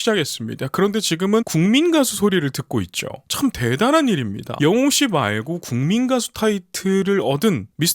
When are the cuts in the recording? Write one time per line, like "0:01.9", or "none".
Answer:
0:01.5
0:04.4